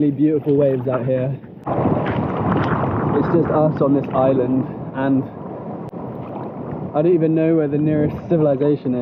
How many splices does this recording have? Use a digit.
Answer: 0